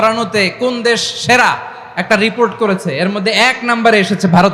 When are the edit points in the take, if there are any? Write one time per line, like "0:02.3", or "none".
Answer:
none